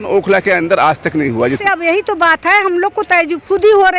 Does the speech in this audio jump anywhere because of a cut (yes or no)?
yes